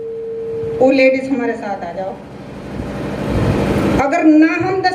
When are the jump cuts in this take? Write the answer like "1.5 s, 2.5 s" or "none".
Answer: none

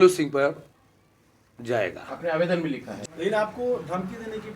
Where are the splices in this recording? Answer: 2.9 s

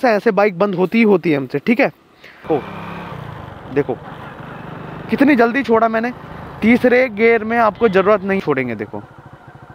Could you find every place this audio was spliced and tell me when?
2.2 s, 8.4 s

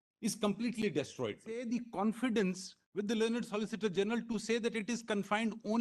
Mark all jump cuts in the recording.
1.5 s

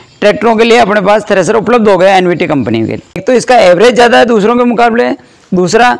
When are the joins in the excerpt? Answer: 3.2 s

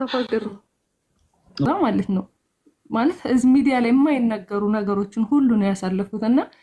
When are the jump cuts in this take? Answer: 1.7 s

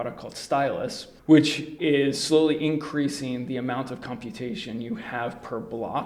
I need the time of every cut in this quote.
1.7 s

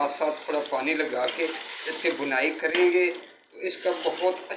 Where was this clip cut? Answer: none

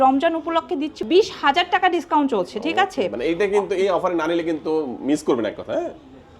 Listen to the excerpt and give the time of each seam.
1.0 s

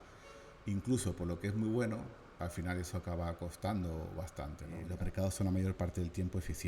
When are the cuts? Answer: 4.8 s

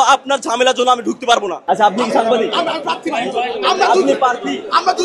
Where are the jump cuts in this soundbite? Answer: 1.6 s

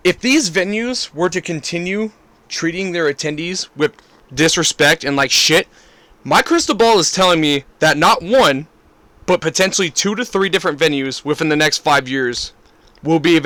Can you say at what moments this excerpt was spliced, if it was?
none

